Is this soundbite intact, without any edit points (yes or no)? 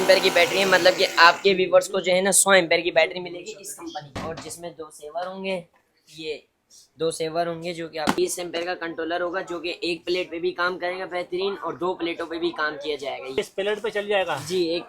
no